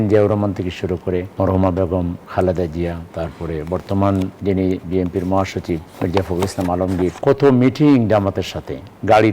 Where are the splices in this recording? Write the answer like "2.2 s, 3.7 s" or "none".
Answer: 1.3 s, 2.2 s, 3.0 s, 4.3 s, 5.9 s, 7.2 s